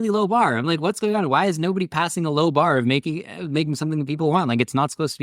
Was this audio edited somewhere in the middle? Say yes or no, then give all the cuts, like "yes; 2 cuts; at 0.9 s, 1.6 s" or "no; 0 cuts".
no; 0 cuts